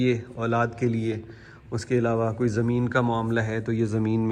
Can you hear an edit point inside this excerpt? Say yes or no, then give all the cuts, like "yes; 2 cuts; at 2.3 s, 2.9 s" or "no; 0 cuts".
no; 0 cuts